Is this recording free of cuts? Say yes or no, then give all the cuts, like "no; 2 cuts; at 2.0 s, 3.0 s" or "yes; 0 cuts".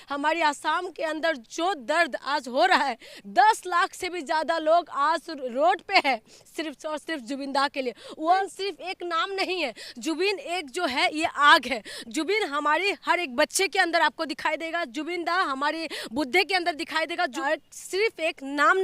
no; 2 cuts; at 8.4 s, 17.4 s